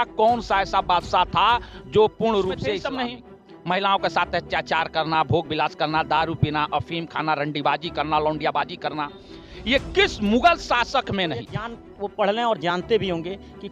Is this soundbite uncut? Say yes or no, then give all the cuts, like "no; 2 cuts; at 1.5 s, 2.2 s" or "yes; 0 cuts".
no; 2 cuts; at 2.7 s, 11.8 s